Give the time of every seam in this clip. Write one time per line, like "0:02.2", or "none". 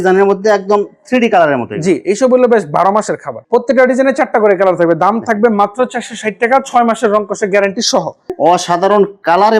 0:03.4
0:08.2